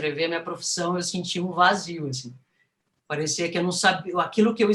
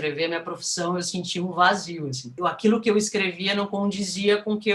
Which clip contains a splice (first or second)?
second